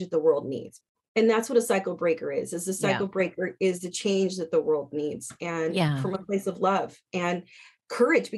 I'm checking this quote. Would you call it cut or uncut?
uncut